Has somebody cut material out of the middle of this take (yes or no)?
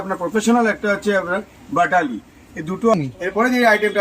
yes